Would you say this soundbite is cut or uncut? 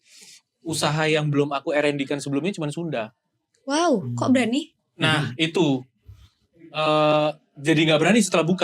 uncut